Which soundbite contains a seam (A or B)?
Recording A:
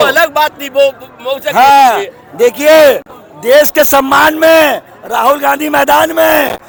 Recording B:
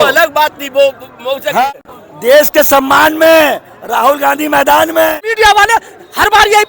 B